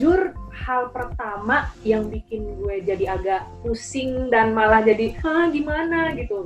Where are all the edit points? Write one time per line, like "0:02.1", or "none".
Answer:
none